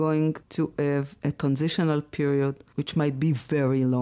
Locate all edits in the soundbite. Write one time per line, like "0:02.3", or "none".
0:01.1